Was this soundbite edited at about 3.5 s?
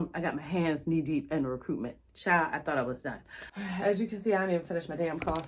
yes; 1 cut; at 3.5 s

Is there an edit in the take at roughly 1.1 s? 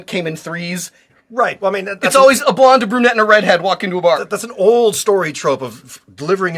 yes; 1 cut; at 1.1 s

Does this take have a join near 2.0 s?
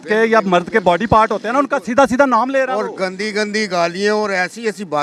no; 0 cuts

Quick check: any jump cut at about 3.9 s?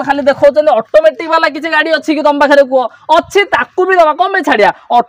no; 0 cuts

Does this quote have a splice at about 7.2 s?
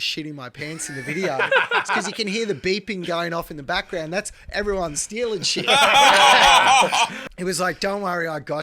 yes; 1 cut; at 7.2 s

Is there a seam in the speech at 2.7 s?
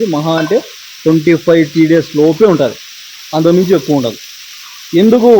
no; 0 cuts

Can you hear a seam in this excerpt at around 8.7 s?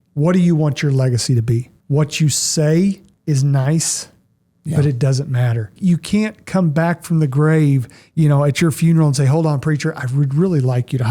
no; 3 cuts; at 1.7 s, 3.1 s, 5.7 s

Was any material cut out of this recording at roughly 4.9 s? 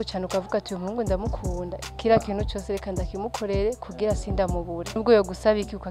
yes; 1 cut; at 4.9 s

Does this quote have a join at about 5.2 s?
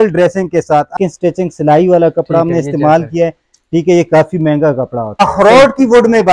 yes; 2 cuts; at 0.9 s, 5.2 s

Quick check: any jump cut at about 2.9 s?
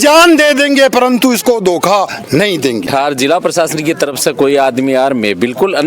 yes; 1 cut; at 2.9 s

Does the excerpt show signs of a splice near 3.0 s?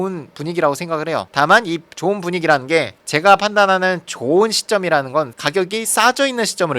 yes; 1 cut; at 3.0 s

